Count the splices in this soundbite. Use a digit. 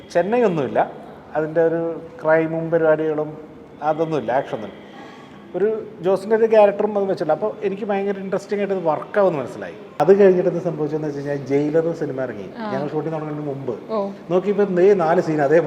1